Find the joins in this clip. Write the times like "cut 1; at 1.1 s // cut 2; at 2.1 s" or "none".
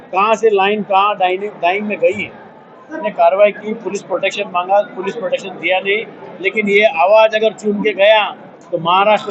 cut 1; at 3.0 s